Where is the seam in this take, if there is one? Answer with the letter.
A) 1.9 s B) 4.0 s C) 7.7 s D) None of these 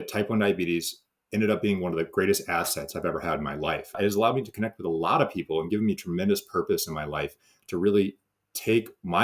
B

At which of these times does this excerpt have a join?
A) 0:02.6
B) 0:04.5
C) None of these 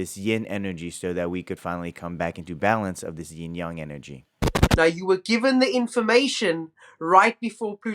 B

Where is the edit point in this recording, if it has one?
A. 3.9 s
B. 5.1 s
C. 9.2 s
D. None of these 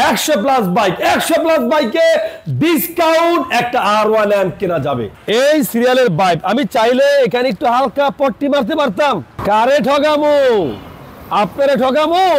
B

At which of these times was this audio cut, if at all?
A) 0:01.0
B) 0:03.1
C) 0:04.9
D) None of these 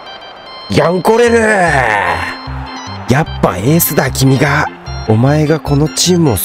C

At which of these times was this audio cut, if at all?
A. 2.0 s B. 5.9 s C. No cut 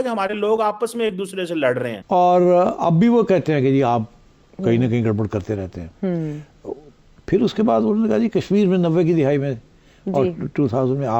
A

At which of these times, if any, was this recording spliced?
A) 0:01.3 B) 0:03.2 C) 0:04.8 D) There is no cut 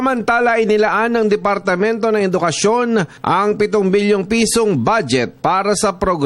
B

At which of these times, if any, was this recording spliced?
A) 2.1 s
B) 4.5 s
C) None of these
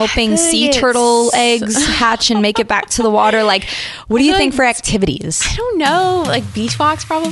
C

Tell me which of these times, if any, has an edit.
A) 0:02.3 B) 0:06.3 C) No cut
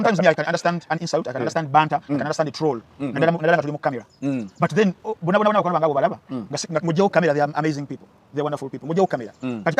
C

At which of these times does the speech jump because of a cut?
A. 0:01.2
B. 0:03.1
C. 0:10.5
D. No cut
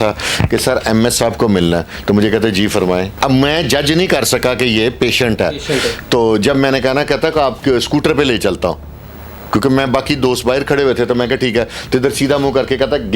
B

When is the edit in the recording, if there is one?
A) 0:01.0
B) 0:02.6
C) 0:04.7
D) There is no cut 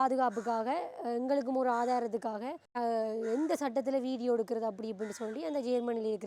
B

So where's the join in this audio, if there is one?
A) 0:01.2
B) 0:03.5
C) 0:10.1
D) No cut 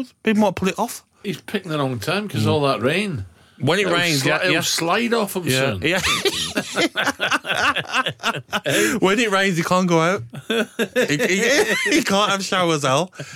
A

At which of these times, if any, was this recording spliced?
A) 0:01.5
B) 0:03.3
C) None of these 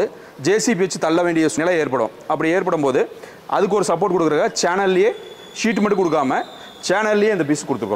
A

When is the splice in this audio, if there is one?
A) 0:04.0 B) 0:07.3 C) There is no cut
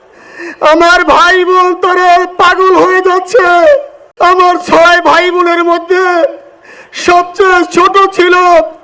A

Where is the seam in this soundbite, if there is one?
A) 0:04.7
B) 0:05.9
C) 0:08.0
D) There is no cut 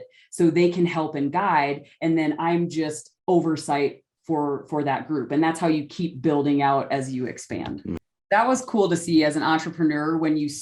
C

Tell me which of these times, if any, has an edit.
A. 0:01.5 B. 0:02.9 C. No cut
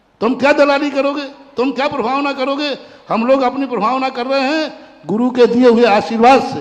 C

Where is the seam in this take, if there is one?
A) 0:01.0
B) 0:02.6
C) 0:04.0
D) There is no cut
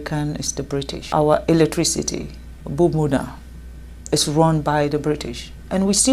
A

